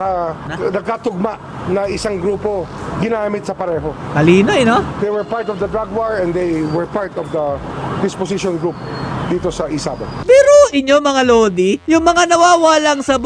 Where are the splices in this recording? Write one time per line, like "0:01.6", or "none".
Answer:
0:10.1